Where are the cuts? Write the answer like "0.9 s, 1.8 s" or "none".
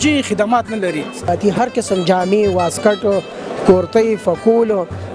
1.3 s